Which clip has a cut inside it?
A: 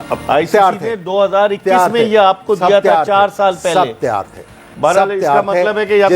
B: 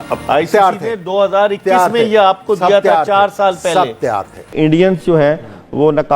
B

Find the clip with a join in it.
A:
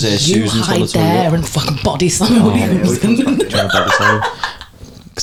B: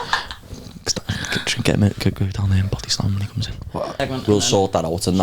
B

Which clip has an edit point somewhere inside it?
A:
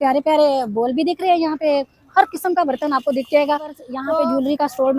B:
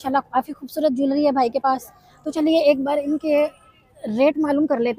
A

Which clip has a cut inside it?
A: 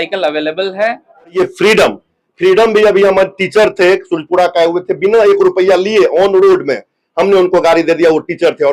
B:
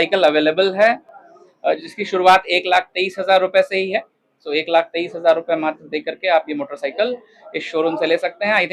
A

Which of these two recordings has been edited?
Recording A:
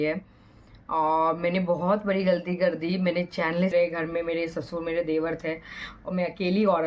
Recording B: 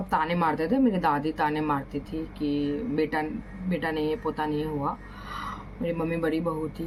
A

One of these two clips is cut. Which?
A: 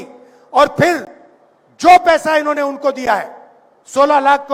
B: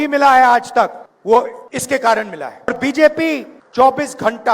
B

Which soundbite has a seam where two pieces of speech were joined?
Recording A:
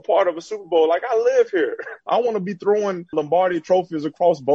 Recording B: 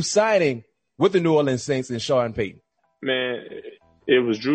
A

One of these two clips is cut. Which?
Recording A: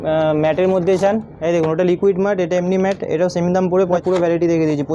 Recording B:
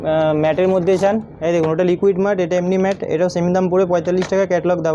A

